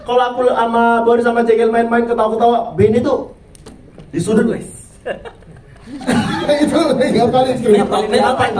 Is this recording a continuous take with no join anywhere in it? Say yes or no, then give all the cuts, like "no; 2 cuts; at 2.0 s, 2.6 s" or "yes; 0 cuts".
yes; 0 cuts